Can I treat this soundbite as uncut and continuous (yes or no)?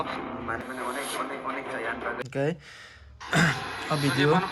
no